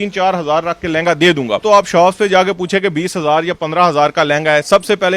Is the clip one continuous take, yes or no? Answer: no